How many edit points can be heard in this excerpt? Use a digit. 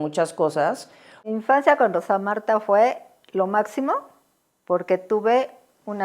1